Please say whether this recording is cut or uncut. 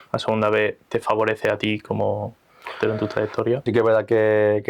cut